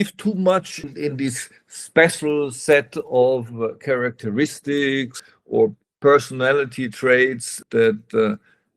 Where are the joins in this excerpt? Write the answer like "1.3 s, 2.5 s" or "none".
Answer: 0.9 s, 5.2 s, 7.6 s